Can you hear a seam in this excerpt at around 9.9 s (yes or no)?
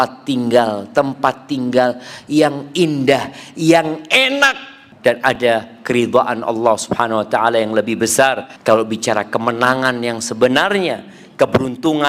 no